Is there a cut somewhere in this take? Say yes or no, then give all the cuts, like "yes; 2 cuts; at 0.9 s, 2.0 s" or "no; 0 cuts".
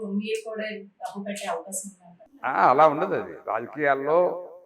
yes; 1 cut; at 2.4 s